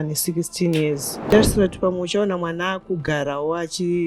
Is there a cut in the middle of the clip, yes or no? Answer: yes